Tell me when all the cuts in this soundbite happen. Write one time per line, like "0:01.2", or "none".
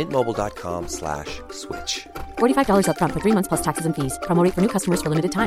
none

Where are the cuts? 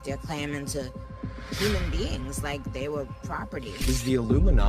none

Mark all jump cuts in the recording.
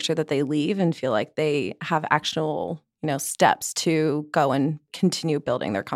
0:04.9

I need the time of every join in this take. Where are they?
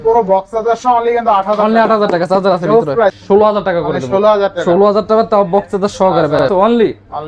0:03.2
0:06.4

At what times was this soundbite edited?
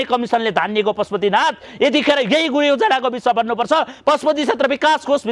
none

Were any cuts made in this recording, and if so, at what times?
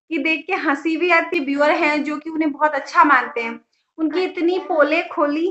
0:01.3

